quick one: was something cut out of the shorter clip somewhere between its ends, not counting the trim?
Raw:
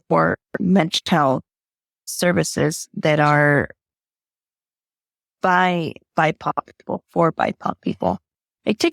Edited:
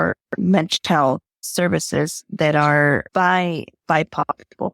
yes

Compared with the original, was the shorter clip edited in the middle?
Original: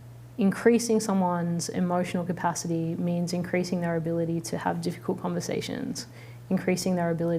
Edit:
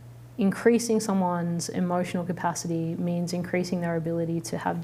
no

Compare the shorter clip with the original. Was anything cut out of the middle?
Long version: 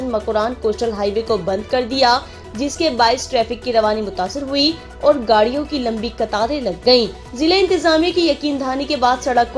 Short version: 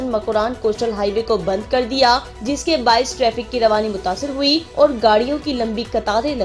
yes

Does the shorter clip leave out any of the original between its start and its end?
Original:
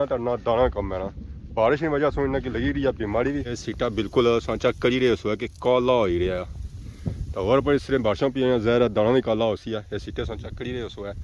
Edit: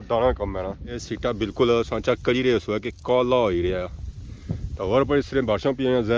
yes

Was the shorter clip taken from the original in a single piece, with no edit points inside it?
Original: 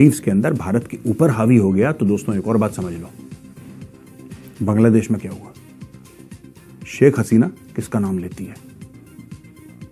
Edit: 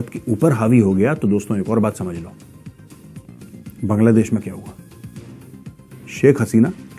yes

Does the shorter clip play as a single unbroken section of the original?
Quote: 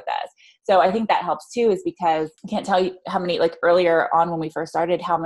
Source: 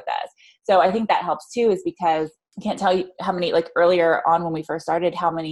no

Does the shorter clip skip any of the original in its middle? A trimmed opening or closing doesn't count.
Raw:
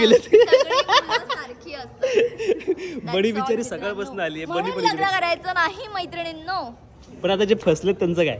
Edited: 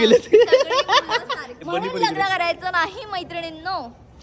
yes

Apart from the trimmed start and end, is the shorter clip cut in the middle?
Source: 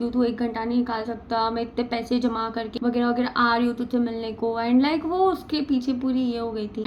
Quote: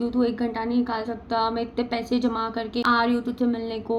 yes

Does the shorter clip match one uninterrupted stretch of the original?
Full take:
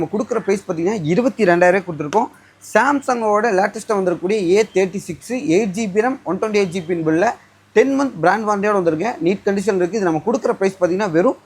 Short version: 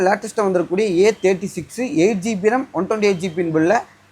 yes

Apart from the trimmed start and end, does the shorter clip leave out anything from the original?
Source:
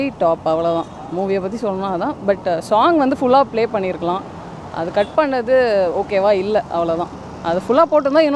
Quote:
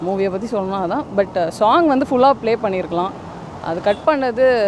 no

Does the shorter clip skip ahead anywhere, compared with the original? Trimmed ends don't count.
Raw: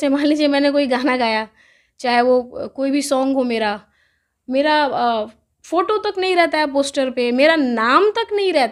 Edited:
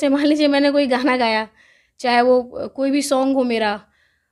no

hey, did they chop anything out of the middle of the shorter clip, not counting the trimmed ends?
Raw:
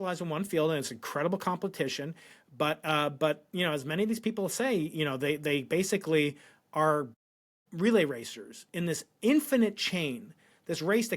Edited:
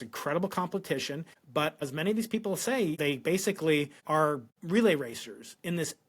yes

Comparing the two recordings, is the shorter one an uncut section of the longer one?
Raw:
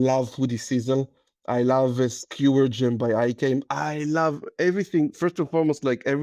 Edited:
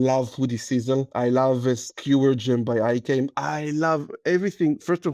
no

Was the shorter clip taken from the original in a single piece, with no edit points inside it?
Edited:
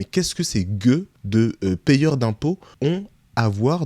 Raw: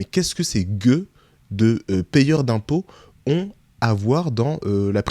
no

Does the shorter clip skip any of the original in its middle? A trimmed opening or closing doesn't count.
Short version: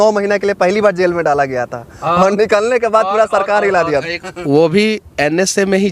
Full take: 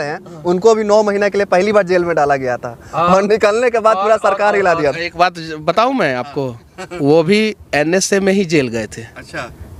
yes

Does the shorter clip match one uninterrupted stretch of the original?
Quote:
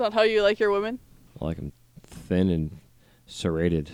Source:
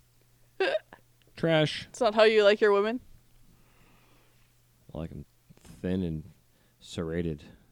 no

